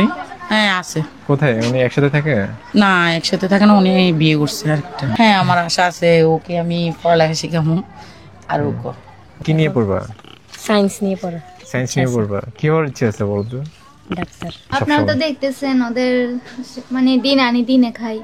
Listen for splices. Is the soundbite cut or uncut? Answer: cut